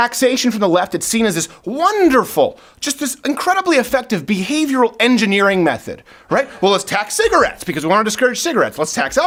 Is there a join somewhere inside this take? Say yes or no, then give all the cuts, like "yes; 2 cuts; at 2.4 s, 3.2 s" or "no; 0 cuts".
no; 0 cuts